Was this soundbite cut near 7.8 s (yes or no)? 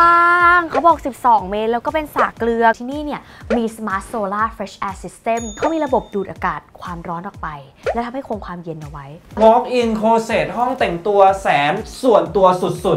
no